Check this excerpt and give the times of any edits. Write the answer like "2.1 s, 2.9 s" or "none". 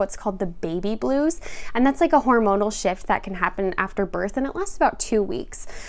none